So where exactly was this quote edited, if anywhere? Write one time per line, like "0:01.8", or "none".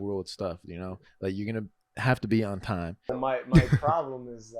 0:03.1